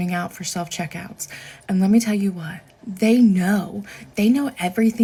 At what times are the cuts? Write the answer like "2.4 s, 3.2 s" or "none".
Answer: none